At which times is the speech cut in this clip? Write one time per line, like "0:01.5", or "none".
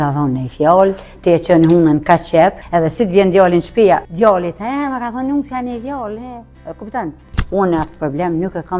0:02.6
0:04.1
0:07.3